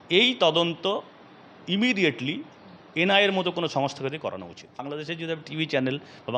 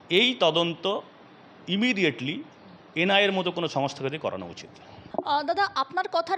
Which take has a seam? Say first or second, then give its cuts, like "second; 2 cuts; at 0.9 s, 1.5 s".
first; 1 cut; at 4.9 s